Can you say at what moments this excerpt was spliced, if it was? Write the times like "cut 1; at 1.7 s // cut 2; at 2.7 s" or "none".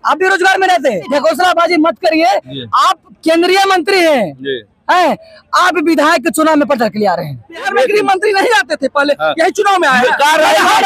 cut 1; at 1.1 s // cut 2; at 7.7 s